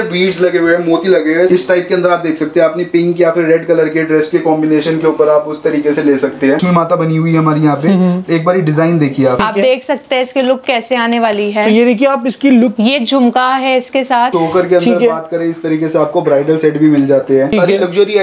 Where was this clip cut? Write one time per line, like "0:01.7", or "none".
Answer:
0:01.5
0:06.6
0:09.4
0:12.7
0:14.3
0:17.5

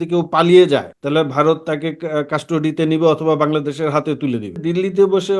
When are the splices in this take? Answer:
0:00.9
0:04.6

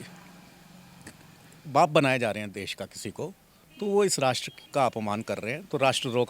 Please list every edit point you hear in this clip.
0:04.5

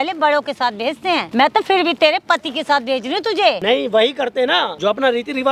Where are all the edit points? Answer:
0:01.3
0:03.6
0:04.7

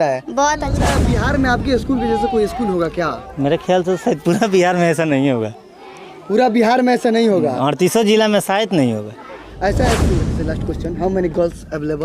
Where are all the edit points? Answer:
0:01.1
0:10.3

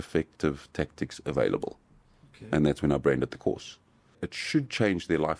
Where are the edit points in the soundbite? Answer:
0:04.3

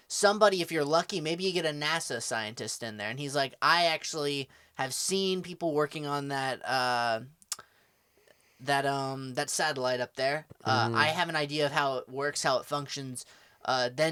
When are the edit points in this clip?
none

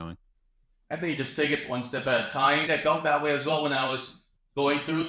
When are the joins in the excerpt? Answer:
0:02.7

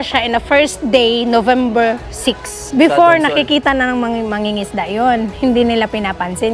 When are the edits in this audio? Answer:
0:02.5

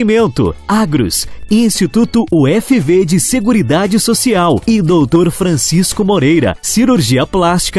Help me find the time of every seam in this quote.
none

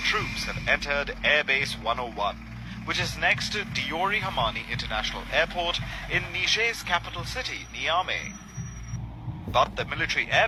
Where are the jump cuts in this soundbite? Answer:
none

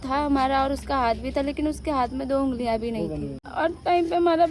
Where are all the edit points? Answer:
0:03.4

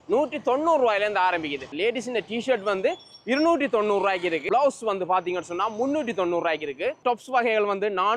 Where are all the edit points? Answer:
0:01.7
0:04.4

